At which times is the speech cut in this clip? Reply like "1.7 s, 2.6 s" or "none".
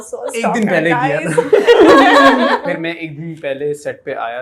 2.6 s